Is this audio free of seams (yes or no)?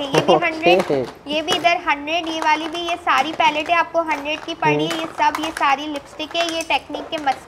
yes